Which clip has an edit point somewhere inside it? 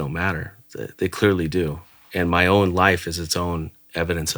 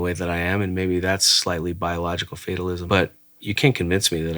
second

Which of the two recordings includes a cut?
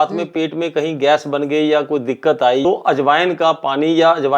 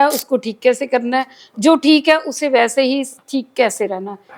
first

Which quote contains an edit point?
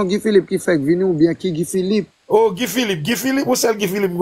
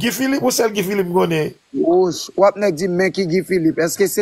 first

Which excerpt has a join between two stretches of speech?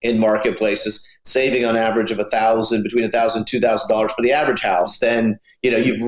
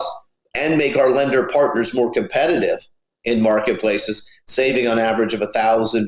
first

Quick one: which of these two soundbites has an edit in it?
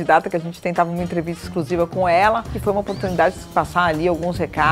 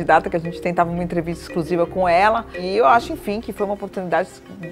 first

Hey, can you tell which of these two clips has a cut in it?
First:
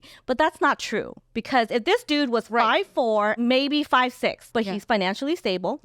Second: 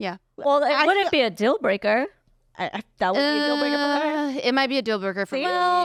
first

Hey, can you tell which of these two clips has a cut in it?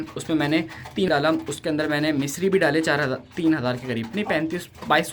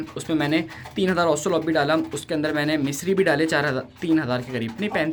first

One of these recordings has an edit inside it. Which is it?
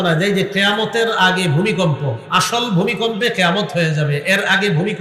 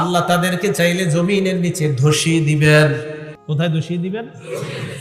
second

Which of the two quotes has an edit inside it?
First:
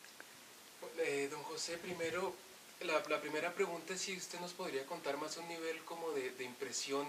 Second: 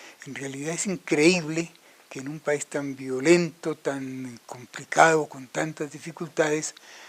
second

